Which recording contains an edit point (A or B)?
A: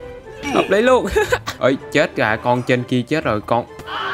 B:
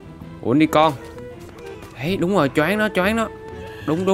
A